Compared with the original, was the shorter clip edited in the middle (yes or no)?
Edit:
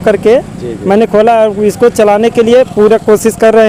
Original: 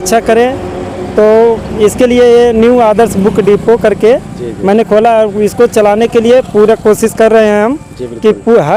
no